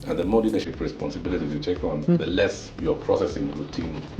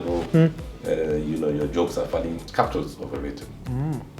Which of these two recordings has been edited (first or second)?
second